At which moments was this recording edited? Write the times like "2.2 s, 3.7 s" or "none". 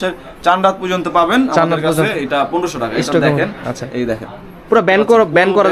none